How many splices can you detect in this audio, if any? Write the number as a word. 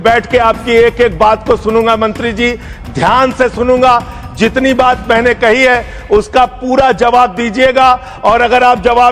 zero